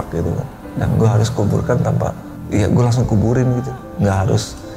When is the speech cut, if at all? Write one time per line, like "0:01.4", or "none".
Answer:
0:02.3